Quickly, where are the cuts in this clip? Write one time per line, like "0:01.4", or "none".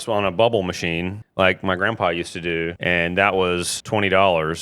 0:01.2
0:02.8
0:03.7